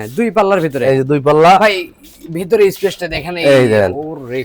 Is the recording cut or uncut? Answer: uncut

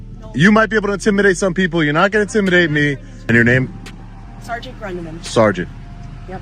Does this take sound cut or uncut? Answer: cut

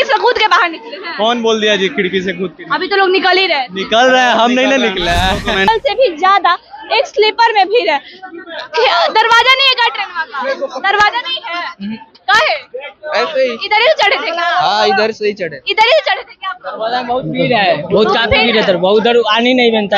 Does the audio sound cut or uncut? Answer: cut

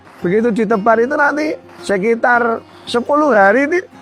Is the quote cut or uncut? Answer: uncut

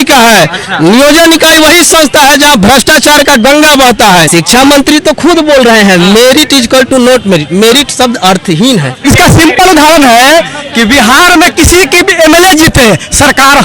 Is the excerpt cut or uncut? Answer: cut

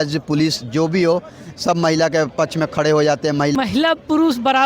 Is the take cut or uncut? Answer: cut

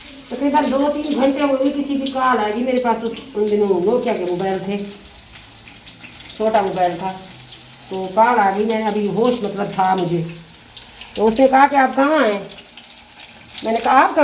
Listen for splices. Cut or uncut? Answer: uncut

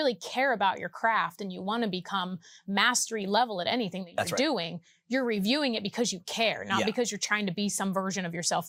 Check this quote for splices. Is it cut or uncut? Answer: uncut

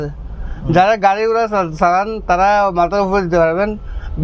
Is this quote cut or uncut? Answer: uncut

